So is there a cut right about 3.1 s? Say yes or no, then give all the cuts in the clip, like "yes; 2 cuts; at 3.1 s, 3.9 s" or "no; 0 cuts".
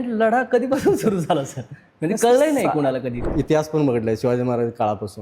yes; 1 cut; at 3.1 s